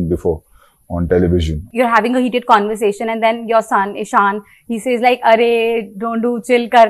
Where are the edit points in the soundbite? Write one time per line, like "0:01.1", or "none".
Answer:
0:01.7